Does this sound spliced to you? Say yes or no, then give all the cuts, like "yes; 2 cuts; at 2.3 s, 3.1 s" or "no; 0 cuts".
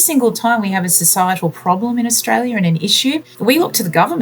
yes; 1 cut; at 3.3 s